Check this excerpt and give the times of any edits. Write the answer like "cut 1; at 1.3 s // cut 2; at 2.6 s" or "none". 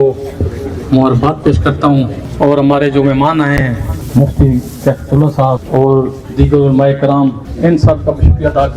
cut 1; at 2.2 s // cut 2; at 3.9 s // cut 3; at 5.6 s // cut 4; at 7.5 s